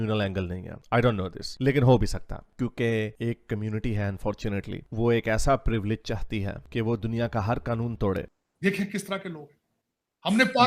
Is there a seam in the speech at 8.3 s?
yes; 1 cut; at 8.3 s

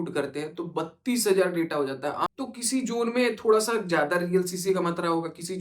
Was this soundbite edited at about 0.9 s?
no; 1 cut; at 2.3 s

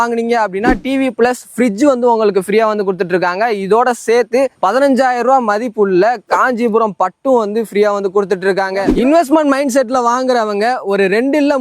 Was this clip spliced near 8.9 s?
yes; 1 cut; at 8.9 s

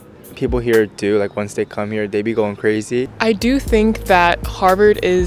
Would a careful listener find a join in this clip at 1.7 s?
no; 1 cut; at 3.1 s

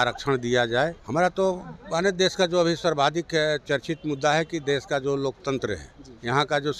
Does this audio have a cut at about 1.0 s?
yes; 1 cut; at 1.0 s

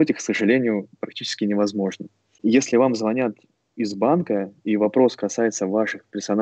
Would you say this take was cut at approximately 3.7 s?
no; 1 cut; at 2.3 s

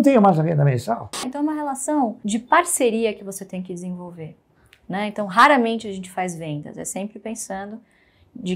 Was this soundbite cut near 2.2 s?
yes; 2 cuts; at 1.3 s, 2.2 s

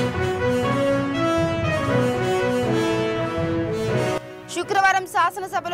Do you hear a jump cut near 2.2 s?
no; 1 cut; at 4.3 s

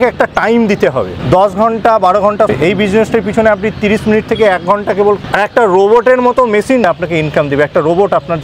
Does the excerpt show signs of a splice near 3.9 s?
no; 4 cuts; at 1.2 s, 2.5 s, 5.2 s, 6.8 s

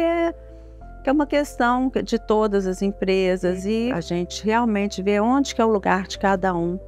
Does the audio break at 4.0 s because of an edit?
yes; 1 cut; at 4.0 s

